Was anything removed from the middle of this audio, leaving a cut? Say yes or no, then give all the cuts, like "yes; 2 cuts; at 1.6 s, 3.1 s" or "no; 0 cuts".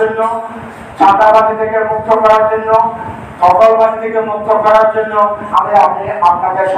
no; 0 cuts